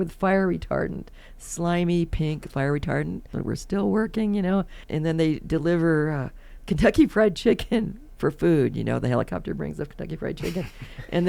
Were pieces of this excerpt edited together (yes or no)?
yes